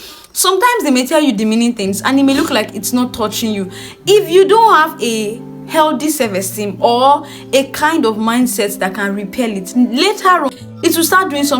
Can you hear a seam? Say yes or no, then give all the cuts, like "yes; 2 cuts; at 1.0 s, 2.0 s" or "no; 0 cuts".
yes; 1 cut; at 10.6 s